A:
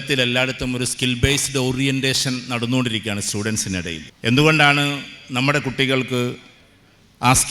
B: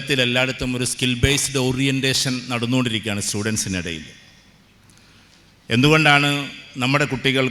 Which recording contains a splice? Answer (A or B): A